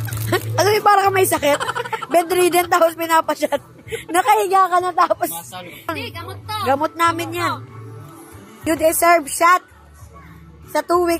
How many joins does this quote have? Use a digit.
2